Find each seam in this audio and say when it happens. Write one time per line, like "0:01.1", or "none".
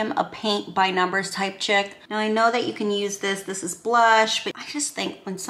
0:02.0
0:04.6